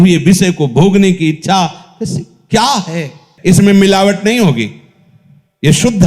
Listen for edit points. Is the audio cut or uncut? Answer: cut